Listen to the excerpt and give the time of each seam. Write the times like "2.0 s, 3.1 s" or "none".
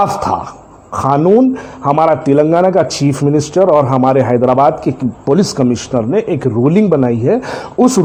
none